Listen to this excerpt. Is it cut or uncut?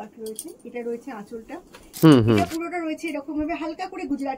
cut